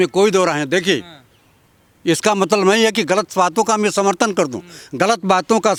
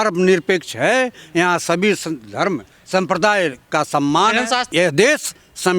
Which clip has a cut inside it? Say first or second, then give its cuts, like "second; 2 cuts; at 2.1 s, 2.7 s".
second; 1 cut; at 4.7 s